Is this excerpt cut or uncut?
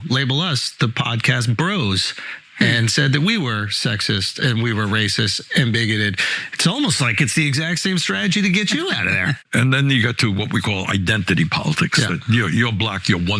cut